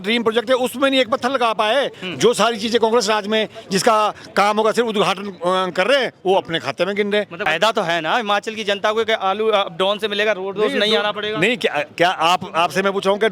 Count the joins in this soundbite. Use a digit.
2